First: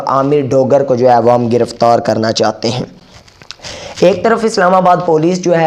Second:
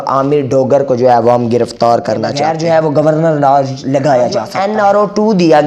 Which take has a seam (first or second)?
second